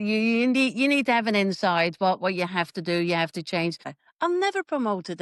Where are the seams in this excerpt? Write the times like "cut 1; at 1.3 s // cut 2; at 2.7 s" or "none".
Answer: cut 1; at 3.9 s